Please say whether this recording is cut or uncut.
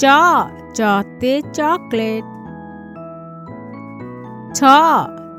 uncut